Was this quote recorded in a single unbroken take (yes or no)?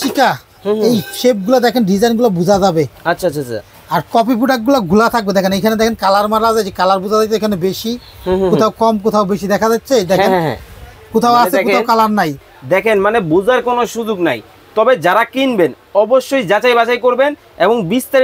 no